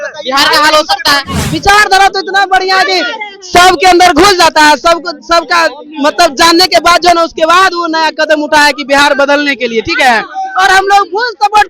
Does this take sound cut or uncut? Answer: cut